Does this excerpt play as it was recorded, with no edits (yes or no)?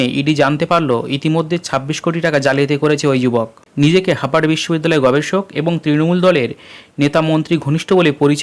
no